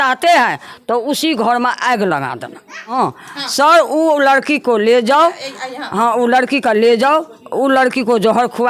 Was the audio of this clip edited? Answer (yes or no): yes